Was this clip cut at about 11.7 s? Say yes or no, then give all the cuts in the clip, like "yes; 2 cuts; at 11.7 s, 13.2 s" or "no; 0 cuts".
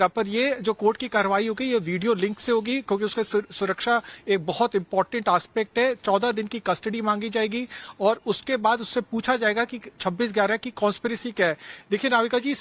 no; 1 cut; at 10.3 s